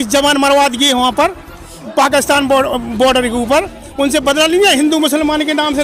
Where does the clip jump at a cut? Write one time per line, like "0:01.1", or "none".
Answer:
none